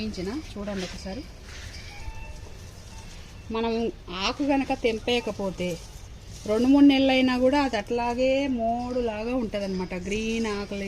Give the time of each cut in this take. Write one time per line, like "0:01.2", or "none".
none